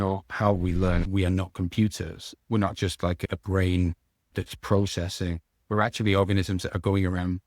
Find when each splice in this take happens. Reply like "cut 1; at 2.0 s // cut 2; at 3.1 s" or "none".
cut 1; at 1.1 s // cut 2; at 2.3 s // cut 3; at 3.2 s // cut 4; at 4.4 s